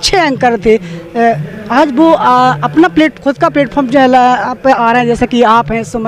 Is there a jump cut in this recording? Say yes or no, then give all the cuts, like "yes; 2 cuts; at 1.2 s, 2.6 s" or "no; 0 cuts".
no; 0 cuts